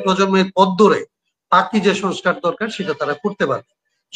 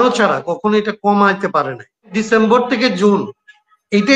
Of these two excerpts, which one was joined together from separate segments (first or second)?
second